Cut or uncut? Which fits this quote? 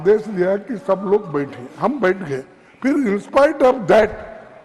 uncut